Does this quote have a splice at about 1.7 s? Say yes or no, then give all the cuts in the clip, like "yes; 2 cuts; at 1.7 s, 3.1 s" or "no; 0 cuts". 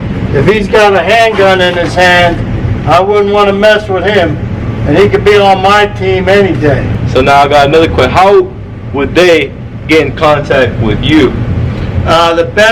no; 1 cut; at 7.0 s